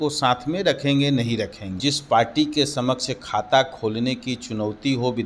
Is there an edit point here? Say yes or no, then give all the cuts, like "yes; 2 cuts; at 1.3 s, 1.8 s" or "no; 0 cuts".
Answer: yes; 1 cut; at 1.8 s